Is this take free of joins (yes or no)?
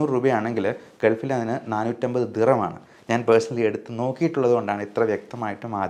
yes